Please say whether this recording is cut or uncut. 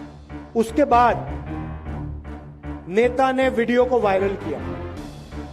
cut